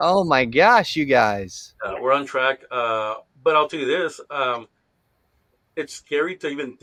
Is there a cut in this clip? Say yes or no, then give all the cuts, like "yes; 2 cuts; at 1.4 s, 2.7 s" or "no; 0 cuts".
no; 0 cuts